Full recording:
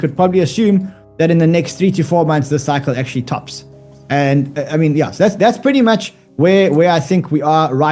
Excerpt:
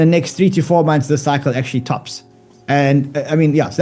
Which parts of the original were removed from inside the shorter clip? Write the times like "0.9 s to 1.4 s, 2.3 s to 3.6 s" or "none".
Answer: none